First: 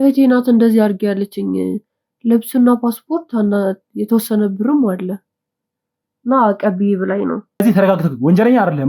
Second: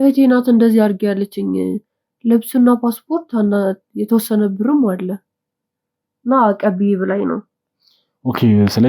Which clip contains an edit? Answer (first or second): first